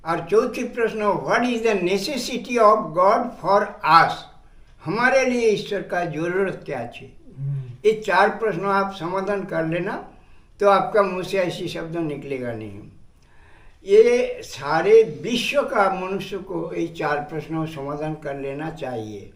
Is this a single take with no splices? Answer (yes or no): yes